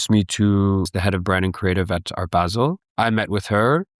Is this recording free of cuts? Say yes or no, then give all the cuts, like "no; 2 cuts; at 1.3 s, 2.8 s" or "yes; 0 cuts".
no; 2 cuts; at 0.9 s, 2.8 s